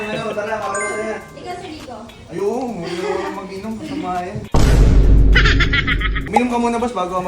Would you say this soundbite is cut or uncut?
cut